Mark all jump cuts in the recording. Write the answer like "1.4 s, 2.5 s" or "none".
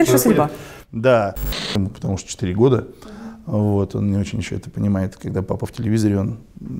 1.7 s